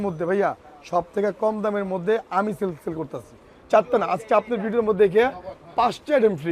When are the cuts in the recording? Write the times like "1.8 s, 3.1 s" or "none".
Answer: 3.5 s